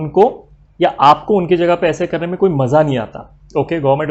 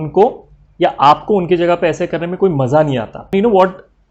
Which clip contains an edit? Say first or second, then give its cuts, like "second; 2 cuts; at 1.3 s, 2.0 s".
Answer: second; 1 cut; at 3.2 s